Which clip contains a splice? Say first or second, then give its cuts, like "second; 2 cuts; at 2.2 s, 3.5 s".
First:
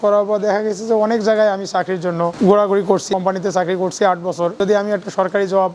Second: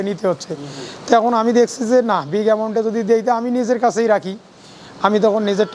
first; 3 cuts; at 2.3 s, 3.1 s, 4.5 s